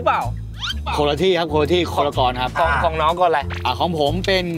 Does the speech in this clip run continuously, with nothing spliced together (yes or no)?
no